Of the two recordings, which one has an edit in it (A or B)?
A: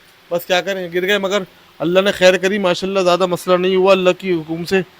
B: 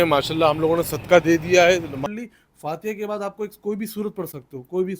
B